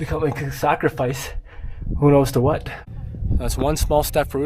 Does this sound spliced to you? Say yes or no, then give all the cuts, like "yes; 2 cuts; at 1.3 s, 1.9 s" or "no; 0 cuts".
yes; 1 cut; at 2.8 s